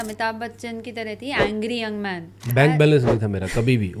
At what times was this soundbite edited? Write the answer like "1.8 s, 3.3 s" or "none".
2.4 s